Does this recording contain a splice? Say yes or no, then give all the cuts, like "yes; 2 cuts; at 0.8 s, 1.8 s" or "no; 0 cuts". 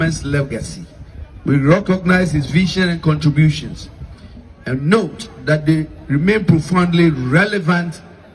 no; 0 cuts